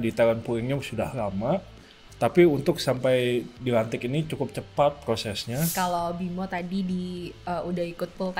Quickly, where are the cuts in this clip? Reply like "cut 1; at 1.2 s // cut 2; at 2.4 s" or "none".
cut 1; at 5.7 s